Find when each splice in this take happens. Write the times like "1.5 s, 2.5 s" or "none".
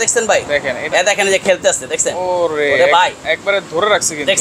none